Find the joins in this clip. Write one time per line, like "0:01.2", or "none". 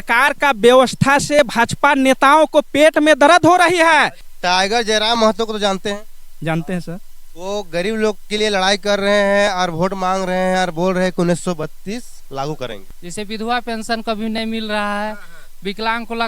0:04.2
0:13.0

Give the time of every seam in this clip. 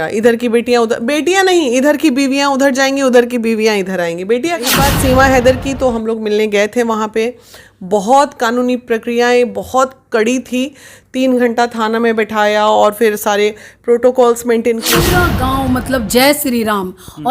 0:04.7
0:14.9

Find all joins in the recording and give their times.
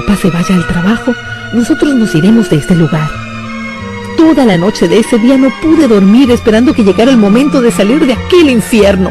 0:01.2

